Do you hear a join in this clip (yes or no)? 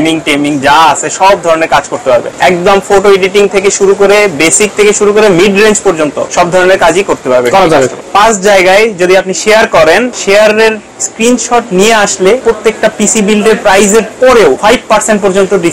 yes